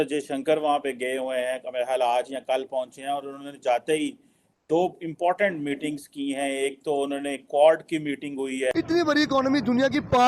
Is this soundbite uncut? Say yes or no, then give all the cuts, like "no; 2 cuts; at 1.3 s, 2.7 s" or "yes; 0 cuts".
no; 1 cut; at 8.7 s